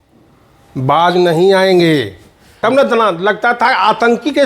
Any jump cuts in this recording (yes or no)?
yes